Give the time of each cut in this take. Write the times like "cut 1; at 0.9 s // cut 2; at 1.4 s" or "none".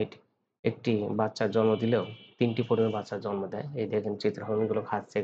none